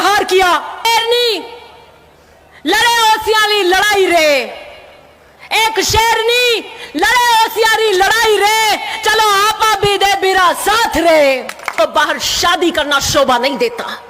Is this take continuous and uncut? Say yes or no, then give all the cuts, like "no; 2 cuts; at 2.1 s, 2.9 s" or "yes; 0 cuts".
no; 2 cuts; at 0.9 s, 11.8 s